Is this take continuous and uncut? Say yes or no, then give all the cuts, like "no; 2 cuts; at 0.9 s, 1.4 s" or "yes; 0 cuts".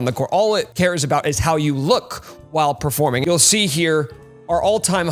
yes; 0 cuts